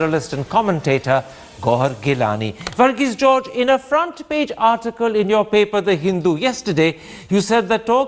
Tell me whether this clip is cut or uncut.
uncut